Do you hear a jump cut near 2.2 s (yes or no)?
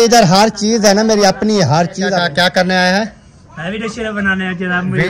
yes